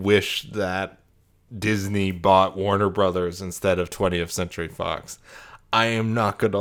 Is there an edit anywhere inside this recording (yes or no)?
no